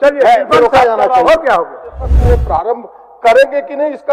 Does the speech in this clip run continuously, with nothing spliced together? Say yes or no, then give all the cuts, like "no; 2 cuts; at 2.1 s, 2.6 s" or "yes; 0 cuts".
no; 1 cut; at 2.2 s